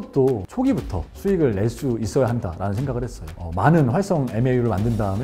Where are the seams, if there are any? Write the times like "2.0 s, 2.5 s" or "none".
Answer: none